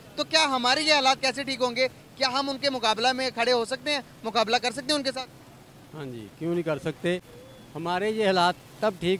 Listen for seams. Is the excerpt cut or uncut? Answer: uncut